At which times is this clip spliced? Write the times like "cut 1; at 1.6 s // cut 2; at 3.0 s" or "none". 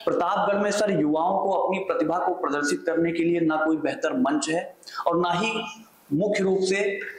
none

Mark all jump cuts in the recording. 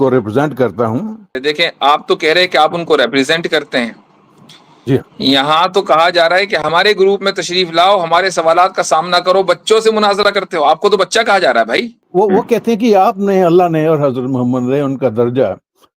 cut 1; at 1.4 s // cut 2; at 12.0 s

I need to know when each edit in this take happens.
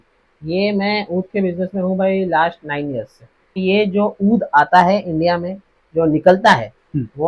cut 1; at 3.6 s

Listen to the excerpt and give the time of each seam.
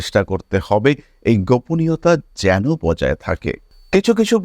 none

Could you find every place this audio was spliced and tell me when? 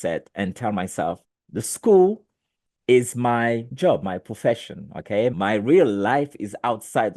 cut 1; at 1.3 s // cut 2; at 3.7 s // cut 3; at 5.3 s

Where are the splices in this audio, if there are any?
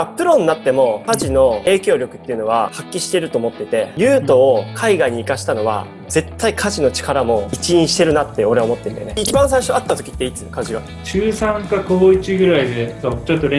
cut 1; at 3.9 s // cut 2; at 9.0 s // cut 3; at 11.0 s

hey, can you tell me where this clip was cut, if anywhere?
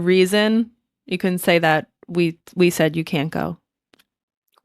none

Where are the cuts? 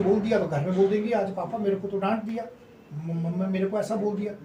none

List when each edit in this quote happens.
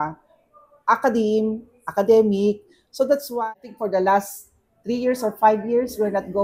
cut 1; at 3.3 s

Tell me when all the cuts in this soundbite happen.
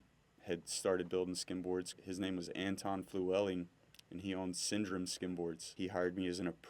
cut 1; at 1.9 s // cut 2; at 5.7 s

